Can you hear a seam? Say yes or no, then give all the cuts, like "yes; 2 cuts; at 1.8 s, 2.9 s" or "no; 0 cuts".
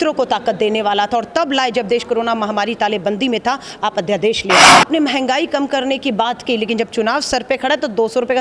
yes; 1 cut; at 4.7 s